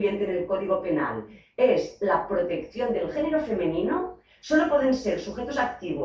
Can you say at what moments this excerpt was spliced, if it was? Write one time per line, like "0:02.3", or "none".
none